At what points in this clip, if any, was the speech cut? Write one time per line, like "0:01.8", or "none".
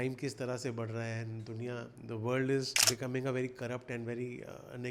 0:02.8

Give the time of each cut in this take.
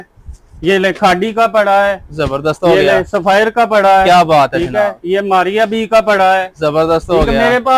none

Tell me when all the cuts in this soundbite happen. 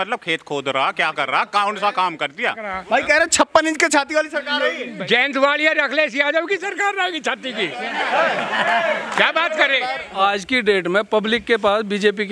0:02.7
0:04.8
0:10.0

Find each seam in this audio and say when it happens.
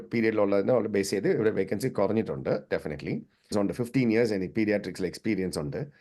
0:03.5

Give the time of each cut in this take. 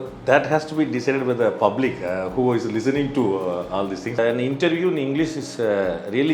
0:04.2

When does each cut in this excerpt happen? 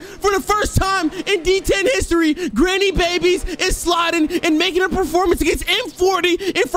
none

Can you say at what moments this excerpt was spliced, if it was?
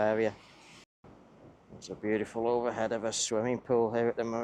0:00.9

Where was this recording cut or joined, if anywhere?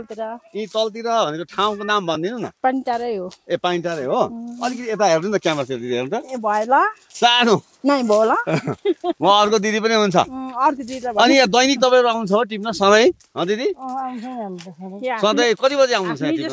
none

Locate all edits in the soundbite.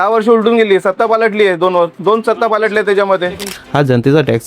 0:03.4

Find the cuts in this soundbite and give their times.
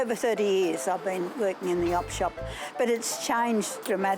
none

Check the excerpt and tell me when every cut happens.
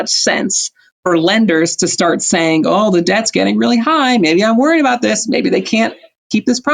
none

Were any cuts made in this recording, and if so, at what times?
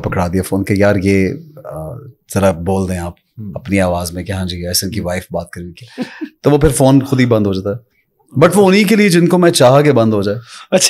none

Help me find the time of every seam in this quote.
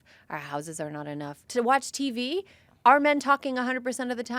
0:01.4

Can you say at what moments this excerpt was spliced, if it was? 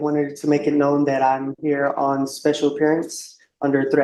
none

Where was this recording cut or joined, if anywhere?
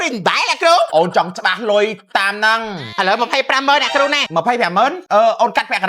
0:00.9
0:02.8
0:04.6

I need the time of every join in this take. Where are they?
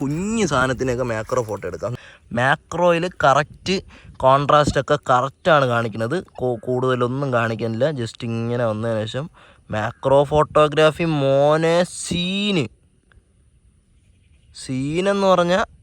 0:01.9

